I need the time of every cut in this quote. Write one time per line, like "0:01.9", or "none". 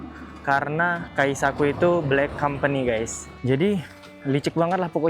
0:01.1
0:03.3